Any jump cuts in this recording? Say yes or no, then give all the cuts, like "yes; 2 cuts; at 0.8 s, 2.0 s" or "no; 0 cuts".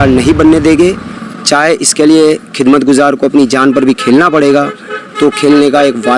no; 0 cuts